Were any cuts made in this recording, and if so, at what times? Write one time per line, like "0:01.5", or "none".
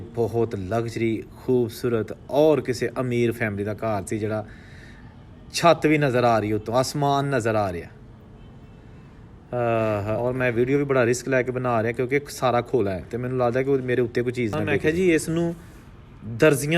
0:10.2
0:14.8